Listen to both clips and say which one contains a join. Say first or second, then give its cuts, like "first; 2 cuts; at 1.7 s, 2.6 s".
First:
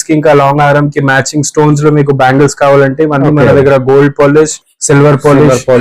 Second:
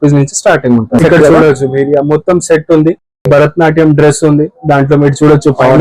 second; 2 cuts; at 1.0 s, 3.2 s